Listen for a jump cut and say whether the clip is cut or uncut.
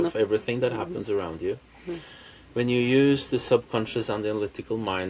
uncut